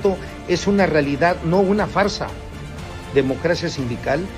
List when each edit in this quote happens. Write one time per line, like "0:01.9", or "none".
0:03.4